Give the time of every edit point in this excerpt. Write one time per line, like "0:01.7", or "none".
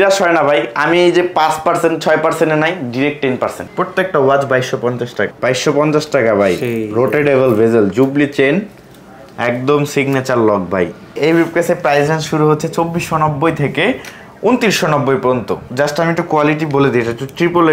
0:03.6
0:05.3
0:11.1
0:15.6